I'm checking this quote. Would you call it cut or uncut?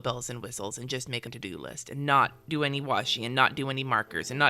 cut